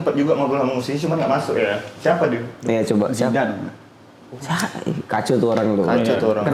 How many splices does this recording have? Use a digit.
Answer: 0